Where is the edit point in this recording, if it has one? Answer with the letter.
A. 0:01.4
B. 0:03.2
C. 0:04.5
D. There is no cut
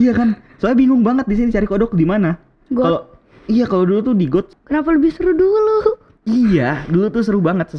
C